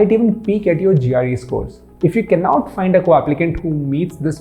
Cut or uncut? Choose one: cut